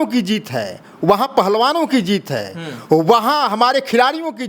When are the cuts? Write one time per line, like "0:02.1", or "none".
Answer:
none

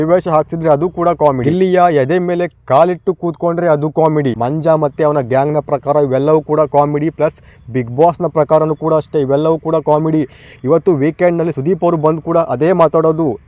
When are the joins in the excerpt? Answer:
0:01.4
0:04.4

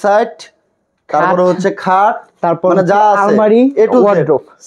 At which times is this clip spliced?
none

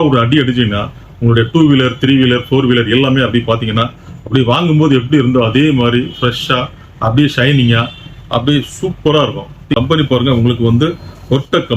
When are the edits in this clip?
0:09.7

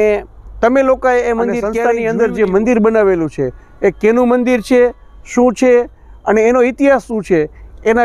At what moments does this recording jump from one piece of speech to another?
0:01.8

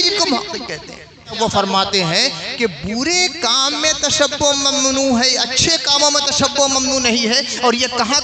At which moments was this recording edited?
0:01.3

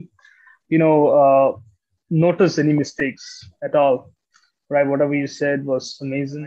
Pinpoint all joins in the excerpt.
none

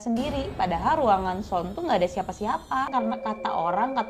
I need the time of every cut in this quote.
0:02.9

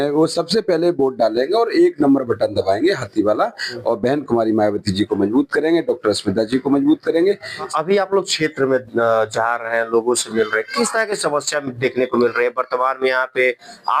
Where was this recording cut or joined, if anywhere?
0:07.7

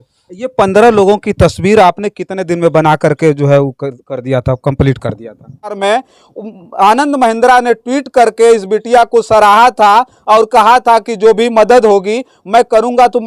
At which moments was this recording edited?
0:05.8

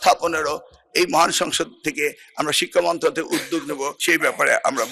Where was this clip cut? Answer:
0:04.0

